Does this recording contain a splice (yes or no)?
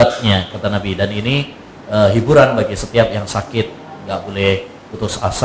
no